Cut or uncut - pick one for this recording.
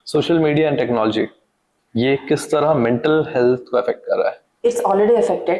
cut